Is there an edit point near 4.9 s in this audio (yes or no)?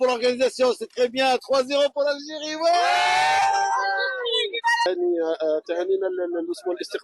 yes